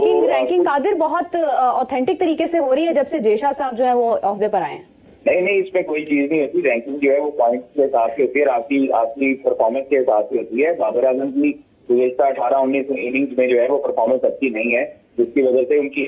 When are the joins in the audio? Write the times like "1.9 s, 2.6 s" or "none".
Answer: none